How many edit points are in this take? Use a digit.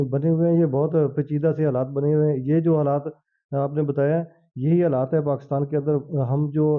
0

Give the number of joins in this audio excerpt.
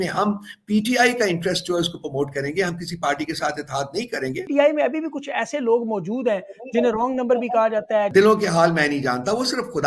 2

